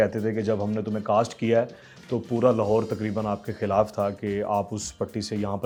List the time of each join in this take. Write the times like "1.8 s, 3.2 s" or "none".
none